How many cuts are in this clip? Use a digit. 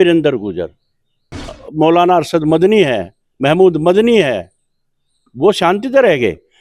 1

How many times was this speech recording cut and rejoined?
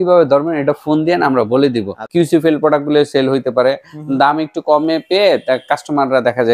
1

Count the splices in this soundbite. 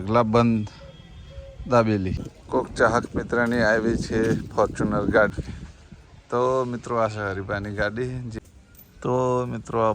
3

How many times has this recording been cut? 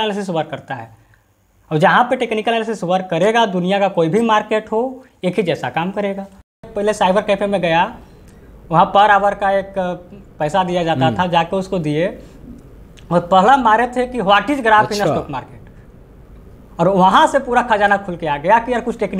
1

